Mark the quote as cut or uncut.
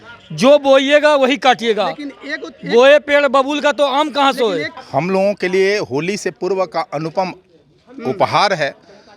cut